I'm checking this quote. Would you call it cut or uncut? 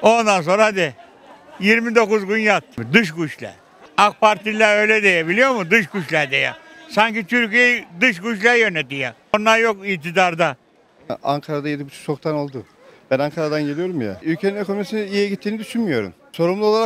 uncut